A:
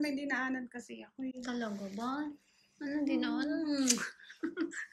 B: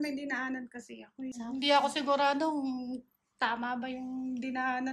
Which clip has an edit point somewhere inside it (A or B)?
B